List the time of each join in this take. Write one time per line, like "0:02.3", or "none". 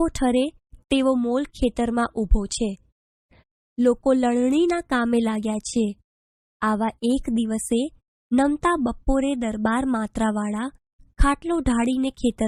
none